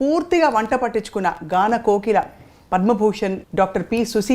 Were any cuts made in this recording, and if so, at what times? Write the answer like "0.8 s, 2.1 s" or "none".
3.4 s

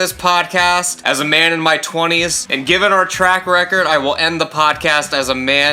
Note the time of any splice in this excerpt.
0.9 s, 2.5 s

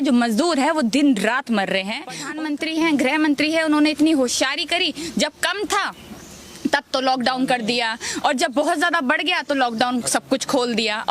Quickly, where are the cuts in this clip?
2.1 s

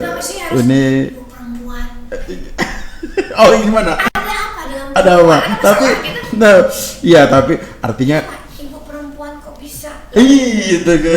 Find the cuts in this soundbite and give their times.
none

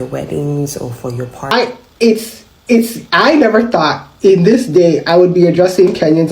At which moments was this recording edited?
1.5 s

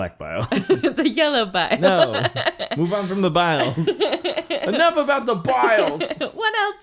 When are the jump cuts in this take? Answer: none

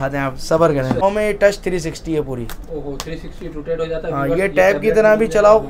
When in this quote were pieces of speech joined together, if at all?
1.0 s

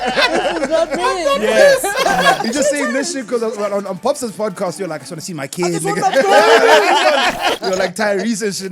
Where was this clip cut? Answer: 2.4 s, 7.6 s

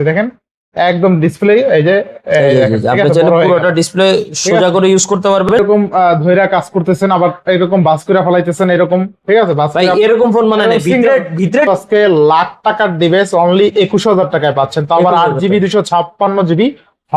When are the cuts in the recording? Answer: 5.5 s, 11.7 s

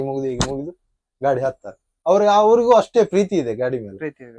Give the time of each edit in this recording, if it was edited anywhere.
none

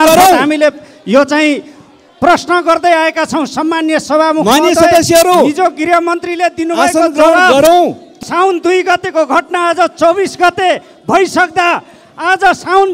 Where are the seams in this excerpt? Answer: 8.2 s

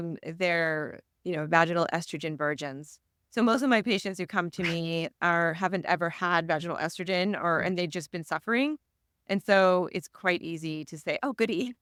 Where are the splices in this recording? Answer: none

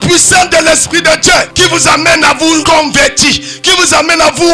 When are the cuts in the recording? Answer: 1.5 s, 2.6 s

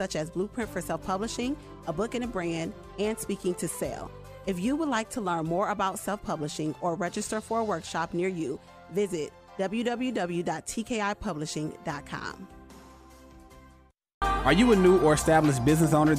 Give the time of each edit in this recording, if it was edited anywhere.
14.2 s

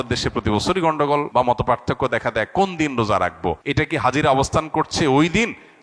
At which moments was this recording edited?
1.3 s, 3.6 s

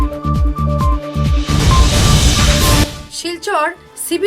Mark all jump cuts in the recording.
2.8 s

